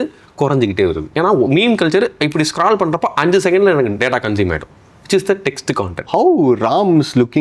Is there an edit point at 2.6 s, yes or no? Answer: no